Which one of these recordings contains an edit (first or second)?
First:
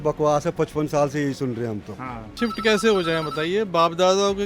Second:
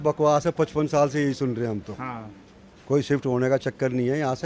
first